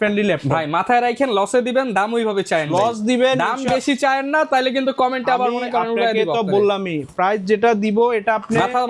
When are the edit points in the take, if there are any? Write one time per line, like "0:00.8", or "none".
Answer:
none